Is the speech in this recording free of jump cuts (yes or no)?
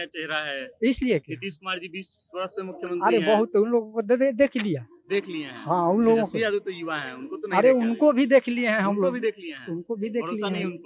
yes